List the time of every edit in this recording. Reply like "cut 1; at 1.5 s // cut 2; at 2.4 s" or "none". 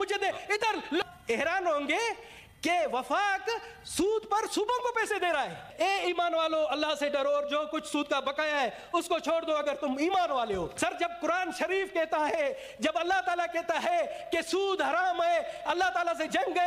cut 1; at 1.0 s // cut 2; at 5.6 s // cut 3; at 10.7 s